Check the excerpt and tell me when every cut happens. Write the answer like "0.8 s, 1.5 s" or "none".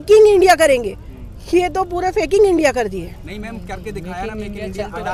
none